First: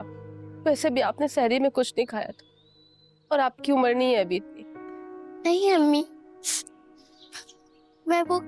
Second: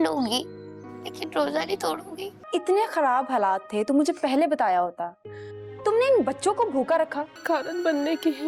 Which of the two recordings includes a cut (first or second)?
second